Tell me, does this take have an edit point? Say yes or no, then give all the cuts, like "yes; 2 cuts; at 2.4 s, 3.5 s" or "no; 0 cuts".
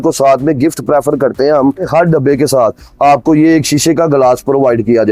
no; 0 cuts